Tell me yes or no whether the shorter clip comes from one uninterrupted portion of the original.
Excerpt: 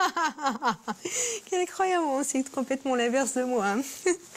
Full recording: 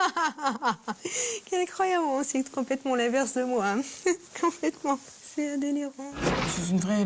yes